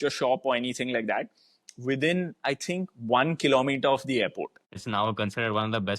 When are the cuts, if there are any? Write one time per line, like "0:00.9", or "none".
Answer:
0:04.8